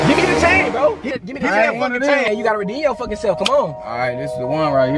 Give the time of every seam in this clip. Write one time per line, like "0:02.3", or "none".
0:01.1
0:02.3